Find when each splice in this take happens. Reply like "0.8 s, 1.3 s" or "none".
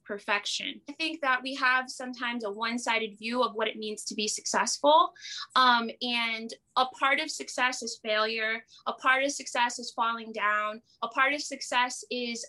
1.0 s